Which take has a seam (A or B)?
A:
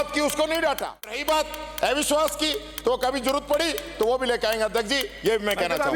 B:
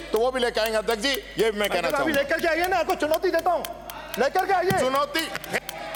A